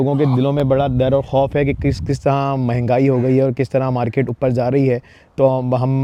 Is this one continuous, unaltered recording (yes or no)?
yes